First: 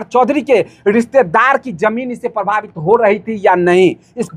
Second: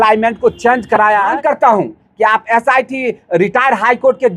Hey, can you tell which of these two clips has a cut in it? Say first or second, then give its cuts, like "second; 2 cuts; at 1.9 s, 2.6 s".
second; 1 cut; at 1.3 s